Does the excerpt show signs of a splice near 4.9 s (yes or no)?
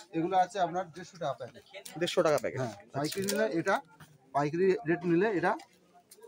no